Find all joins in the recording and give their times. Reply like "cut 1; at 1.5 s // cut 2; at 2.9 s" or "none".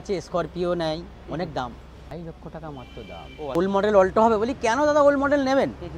cut 1; at 2.1 s // cut 2; at 3.5 s